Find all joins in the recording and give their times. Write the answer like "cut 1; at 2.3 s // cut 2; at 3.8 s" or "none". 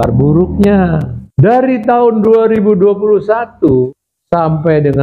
cut 1; at 1.2 s // cut 2; at 4.1 s

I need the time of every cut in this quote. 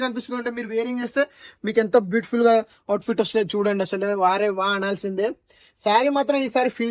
none

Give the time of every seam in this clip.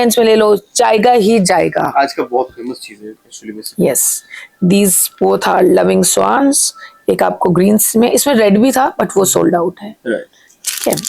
none

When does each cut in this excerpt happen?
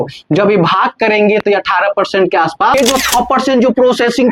cut 1; at 2.7 s

